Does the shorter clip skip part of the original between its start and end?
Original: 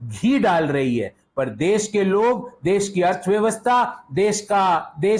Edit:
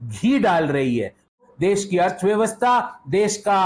yes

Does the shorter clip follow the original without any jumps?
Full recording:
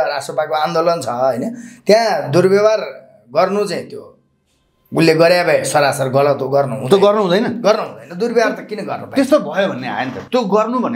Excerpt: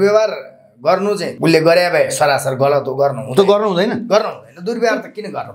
no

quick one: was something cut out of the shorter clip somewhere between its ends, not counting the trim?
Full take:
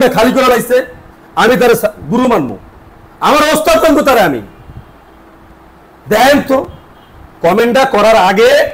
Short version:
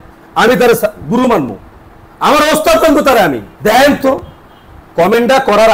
yes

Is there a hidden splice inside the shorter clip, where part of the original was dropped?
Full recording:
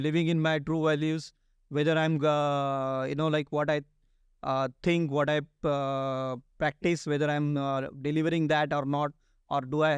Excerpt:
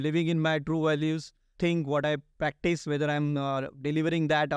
yes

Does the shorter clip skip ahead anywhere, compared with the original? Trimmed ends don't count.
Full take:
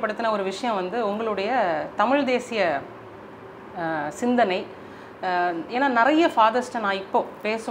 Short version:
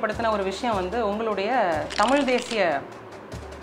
no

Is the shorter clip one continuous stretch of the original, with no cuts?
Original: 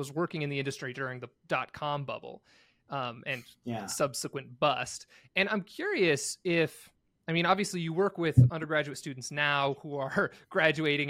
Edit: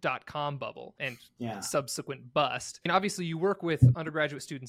no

